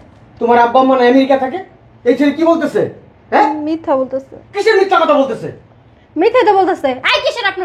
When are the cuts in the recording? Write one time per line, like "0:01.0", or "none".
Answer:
none